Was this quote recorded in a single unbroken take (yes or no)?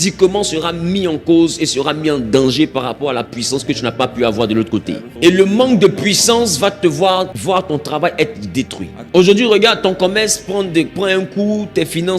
no